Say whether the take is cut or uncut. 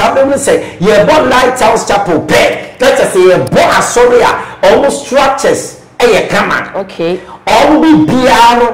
uncut